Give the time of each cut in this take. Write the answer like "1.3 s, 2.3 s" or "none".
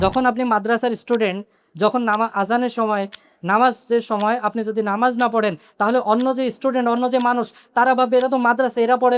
none